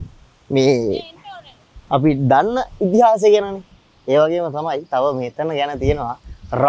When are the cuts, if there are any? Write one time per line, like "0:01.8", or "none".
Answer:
none